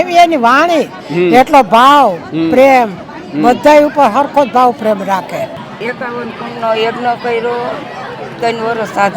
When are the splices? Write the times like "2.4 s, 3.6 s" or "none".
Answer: 5.6 s